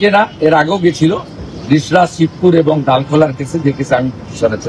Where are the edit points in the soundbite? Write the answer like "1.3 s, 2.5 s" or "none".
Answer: none